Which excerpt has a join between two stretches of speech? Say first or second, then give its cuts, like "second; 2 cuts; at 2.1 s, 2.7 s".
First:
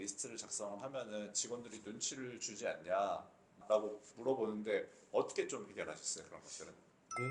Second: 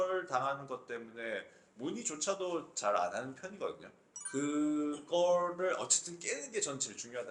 first; 1 cut; at 3.6 s